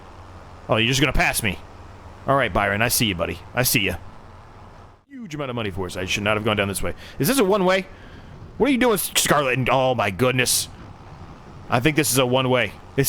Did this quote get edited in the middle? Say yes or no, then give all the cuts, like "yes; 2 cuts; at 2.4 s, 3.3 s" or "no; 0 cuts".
yes; 1 cut; at 5.2 s